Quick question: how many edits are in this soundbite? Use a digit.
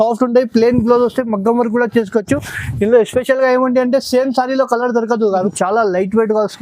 1